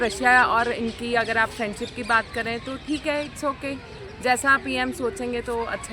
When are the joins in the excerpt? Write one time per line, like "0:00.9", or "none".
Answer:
none